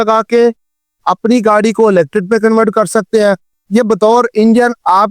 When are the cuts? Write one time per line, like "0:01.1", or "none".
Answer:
0:03.5